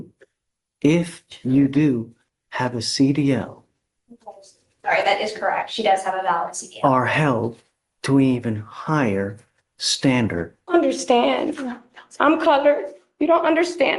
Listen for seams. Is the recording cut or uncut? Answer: cut